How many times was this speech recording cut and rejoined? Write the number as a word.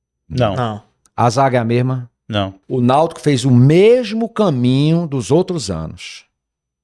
one